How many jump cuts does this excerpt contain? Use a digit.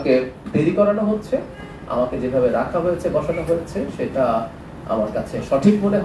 0